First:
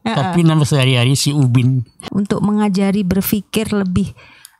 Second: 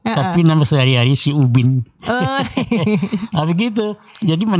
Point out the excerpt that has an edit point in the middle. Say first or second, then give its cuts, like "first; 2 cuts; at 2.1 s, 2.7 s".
first; 1 cut; at 2.0 s